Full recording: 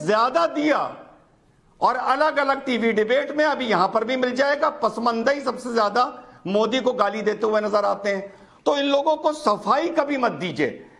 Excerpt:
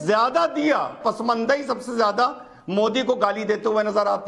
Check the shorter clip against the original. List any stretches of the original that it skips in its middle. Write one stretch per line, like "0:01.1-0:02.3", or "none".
0:01.0-0:04.8

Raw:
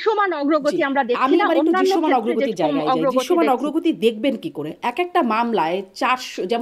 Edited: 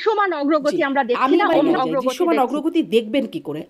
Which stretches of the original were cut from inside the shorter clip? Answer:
0:01.8-0:02.9

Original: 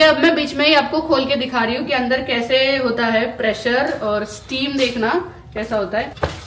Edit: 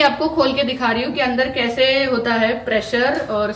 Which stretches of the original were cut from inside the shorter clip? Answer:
none

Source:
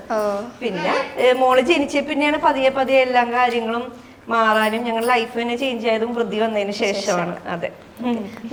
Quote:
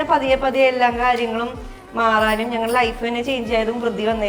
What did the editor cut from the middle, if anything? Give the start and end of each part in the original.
none

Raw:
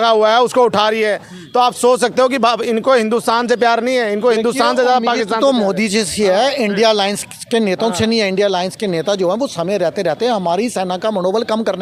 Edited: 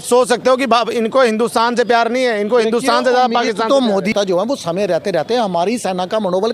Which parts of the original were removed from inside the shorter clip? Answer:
0:05.8-0:09.0

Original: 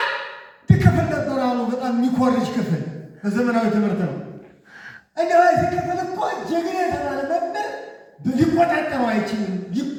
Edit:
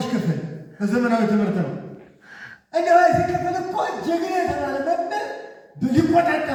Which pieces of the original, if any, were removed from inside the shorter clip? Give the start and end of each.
none

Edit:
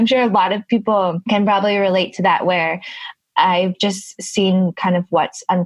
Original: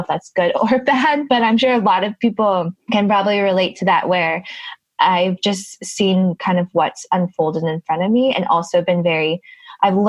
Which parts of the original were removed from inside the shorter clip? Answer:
0:02.7-0:02.8

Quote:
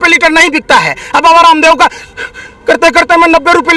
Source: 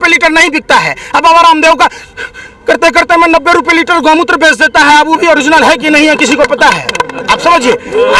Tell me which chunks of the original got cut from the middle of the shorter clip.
none

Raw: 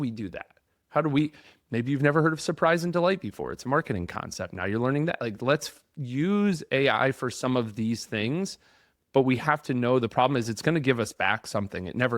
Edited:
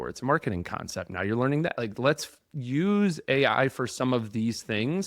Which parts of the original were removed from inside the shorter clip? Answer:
none

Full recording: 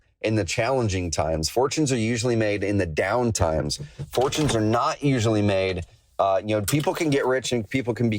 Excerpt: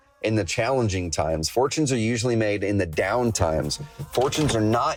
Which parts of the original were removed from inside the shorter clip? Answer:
none

